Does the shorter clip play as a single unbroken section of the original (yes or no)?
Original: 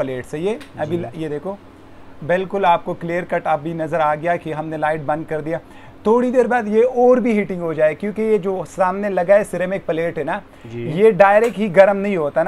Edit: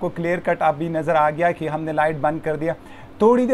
yes